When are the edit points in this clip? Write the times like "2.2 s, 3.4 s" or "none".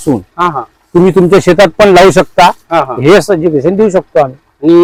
none